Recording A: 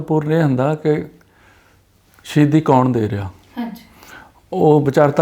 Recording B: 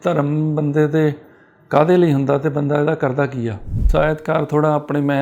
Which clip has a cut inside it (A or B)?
B